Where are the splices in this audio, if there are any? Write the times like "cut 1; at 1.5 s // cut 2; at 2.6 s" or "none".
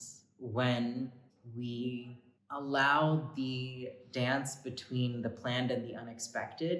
none